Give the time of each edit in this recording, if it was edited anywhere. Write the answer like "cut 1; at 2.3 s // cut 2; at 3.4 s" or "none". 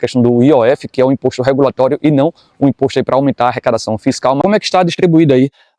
cut 1; at 4.4 s